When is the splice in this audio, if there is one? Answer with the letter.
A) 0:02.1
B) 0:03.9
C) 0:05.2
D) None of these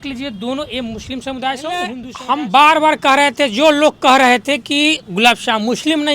A